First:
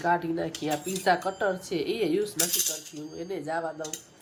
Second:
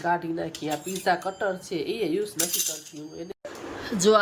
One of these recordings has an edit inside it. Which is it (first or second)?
second